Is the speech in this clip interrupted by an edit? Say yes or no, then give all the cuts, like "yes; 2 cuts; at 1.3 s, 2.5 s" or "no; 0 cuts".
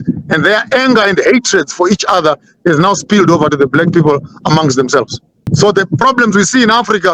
yes; 1 cut; at 5.4 s